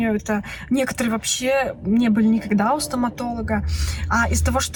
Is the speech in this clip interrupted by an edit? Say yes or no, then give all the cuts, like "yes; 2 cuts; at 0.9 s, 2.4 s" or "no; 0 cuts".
no; 0 cuts